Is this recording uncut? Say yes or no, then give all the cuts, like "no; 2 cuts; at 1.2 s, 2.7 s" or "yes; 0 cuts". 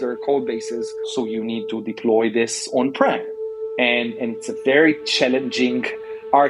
no; 1 cut; at 1.0 s